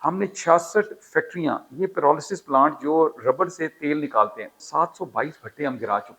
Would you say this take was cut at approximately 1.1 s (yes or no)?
no